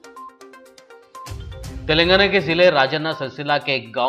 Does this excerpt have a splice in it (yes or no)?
no